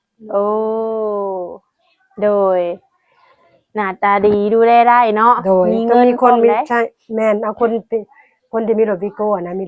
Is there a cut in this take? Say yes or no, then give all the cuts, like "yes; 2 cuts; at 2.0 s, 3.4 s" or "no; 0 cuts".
no; 0 cuts